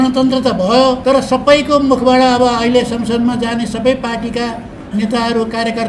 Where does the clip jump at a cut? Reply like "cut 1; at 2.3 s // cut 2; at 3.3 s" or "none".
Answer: cut 1; at 1.0 s